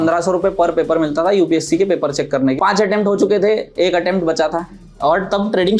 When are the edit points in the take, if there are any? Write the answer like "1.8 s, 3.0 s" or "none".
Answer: 2.6 s, 4.8 s